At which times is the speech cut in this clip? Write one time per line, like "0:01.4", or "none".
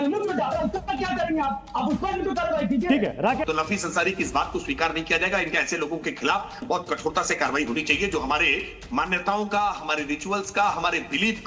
0:03.4